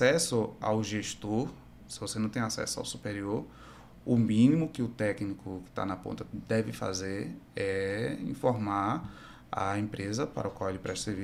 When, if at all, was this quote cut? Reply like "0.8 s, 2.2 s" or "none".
none